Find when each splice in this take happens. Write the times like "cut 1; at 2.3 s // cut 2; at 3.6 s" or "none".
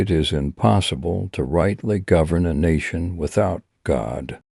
none